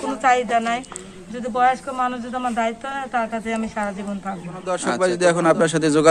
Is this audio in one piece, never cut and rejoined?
no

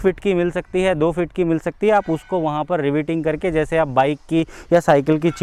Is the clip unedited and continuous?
yes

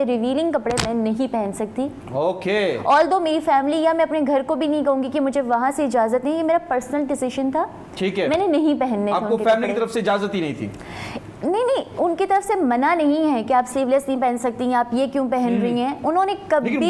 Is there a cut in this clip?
no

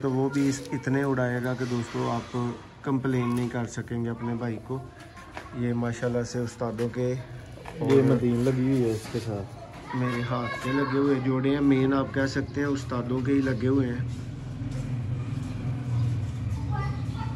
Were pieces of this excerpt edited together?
no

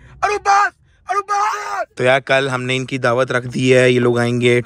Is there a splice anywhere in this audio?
yes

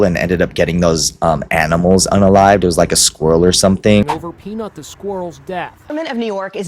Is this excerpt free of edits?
no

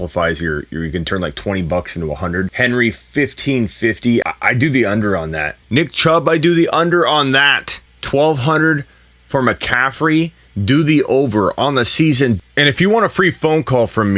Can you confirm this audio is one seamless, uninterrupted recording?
no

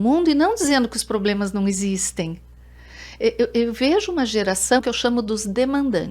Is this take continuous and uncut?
no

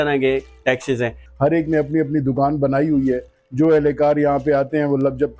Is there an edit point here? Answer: yes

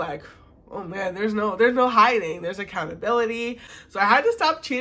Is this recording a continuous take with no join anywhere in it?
no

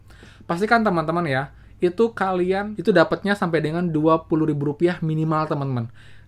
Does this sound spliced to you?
yes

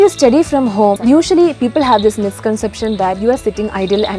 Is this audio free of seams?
no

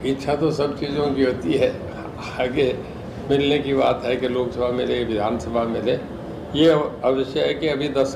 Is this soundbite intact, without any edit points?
yes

